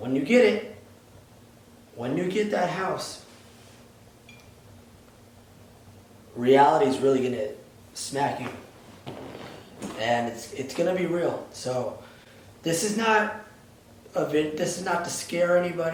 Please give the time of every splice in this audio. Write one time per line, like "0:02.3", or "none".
none